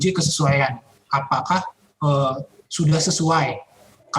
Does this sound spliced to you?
yes; 1 cut; at 2.6 s

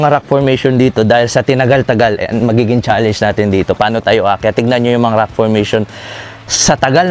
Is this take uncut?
yes; 0 cuts

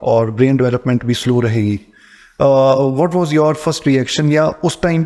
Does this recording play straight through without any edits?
yes; 0 cuts

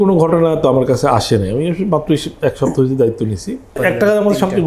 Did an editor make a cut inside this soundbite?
yes; 1 cut; at 3.8 s

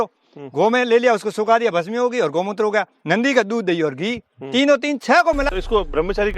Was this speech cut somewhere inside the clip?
yes; 1 cut; at 5.5 s

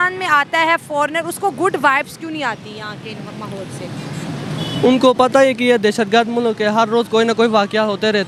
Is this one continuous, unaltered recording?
yes; 0 cuts

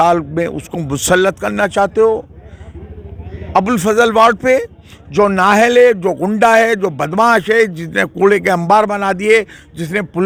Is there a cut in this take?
no; 0 cuts

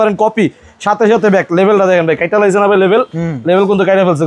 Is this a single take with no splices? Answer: yes; 0 cuts

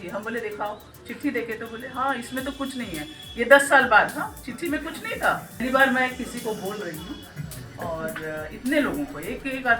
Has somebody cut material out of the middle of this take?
yes; 1 cut; at 5.6 s

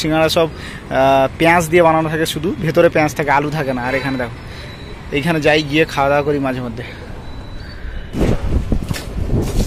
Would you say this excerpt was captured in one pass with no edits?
yes; 0 cuts

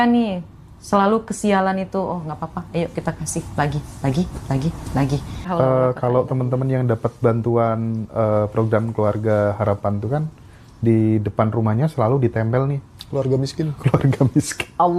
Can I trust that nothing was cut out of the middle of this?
no; 1 cut; at 5.4 s

